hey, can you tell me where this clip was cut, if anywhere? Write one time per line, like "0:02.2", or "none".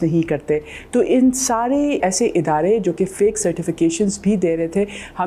0:02.0